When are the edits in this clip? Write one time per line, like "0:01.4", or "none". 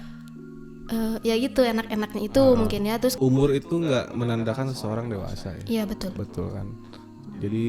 0:03.1